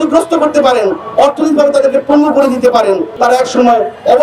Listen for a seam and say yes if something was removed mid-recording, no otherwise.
yes